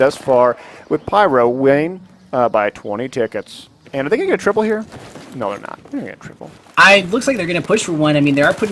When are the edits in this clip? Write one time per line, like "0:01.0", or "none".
0:05.7